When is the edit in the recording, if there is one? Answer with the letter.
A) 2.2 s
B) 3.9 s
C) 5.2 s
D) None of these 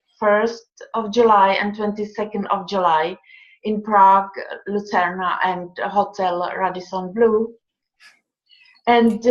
D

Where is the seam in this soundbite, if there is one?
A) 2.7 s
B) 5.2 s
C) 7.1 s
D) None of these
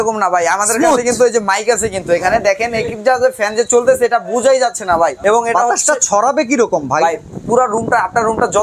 B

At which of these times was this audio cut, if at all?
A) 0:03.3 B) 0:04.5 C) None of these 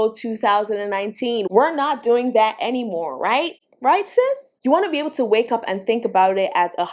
B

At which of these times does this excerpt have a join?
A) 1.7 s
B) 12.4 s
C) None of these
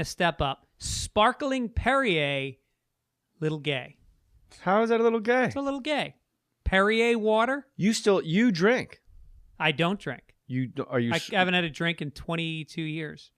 A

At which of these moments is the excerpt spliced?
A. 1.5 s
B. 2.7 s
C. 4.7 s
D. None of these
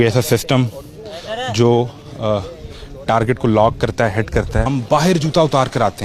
C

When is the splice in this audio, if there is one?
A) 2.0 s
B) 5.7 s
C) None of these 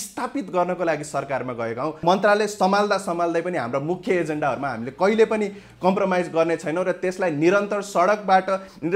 A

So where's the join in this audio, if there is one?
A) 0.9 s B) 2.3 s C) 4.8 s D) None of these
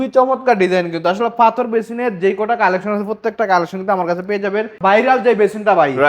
C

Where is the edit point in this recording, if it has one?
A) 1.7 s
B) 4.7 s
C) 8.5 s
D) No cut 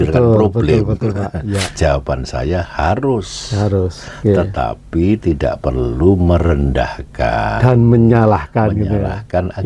A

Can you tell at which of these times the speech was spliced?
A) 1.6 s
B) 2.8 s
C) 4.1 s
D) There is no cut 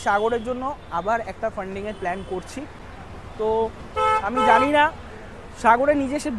D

